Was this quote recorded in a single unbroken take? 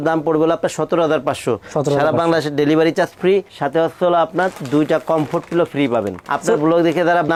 yes; 0 cuts

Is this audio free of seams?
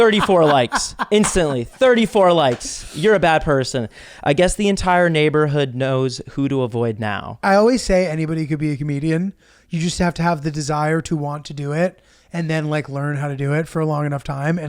no; 1 cut; at 7.4 s

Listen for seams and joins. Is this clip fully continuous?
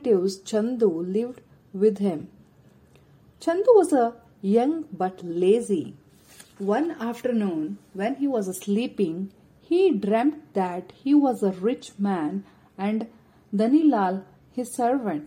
yes; 0 cuts

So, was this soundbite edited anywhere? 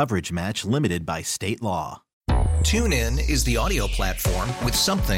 yes; 1 cut; at 2.0 s

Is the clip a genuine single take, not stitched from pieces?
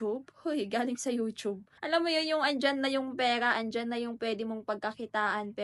no; 1 cut; at 1.7 s

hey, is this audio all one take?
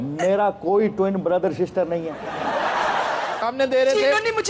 no; 1 cut; at 3.4 s

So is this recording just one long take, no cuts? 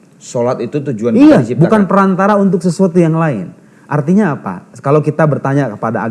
yes; 0 cuts

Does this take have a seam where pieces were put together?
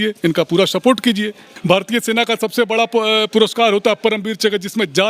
yes; 1 cut; at 1.5 s

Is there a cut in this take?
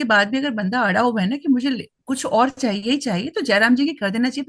no; 0 cuts

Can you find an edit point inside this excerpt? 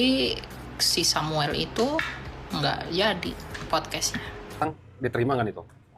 yes; 1 cut; at 4.6 s

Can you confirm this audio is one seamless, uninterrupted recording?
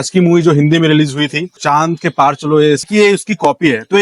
no; 2 cuts; at 1.5 s, 2.8 s

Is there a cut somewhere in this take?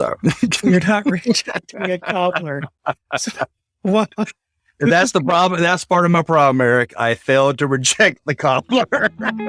no; 0 cuts

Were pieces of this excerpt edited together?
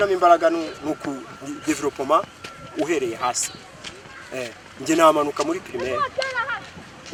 no; 0 cuts

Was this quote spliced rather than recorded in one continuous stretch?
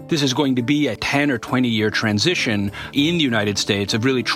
yes; 2 cuts; at 1.0 s, 2.9 s

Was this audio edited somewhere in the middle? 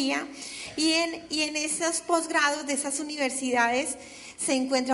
yes; 1 cut; at 3.2 s

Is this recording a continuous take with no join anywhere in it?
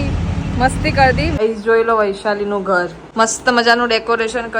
no; 2 cuts; at 1.4 s, 3.0 s

